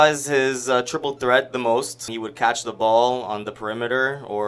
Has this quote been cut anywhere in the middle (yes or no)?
yes